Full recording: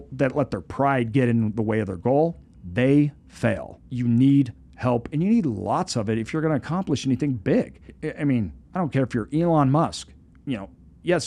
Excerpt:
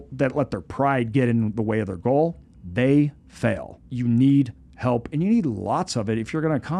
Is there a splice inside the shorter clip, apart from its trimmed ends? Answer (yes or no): no